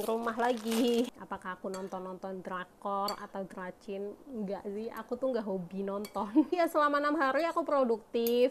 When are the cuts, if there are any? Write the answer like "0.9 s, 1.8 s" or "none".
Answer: 1.1 s, 6.5 s